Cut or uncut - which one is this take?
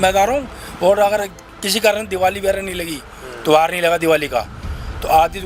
uncut